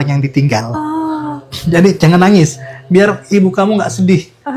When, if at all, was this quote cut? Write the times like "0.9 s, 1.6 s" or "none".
none